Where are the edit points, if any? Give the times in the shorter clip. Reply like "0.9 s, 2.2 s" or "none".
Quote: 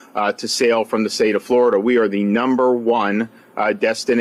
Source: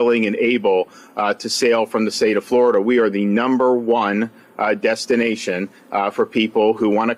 none